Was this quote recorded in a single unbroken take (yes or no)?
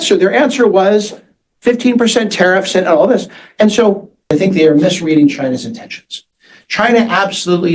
no